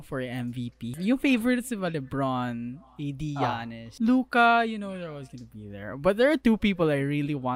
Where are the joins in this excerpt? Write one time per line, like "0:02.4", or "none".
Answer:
0:00.9
0:03.8